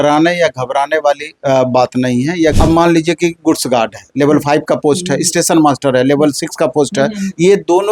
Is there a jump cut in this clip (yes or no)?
yes